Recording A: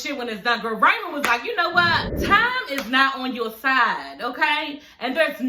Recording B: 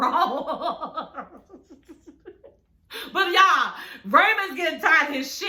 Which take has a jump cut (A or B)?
A